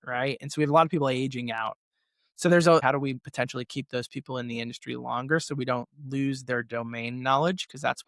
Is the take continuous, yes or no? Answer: no